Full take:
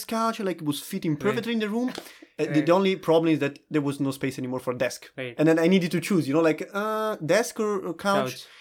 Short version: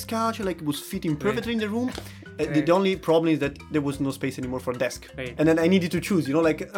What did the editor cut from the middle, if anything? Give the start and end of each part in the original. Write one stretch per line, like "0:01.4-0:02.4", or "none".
none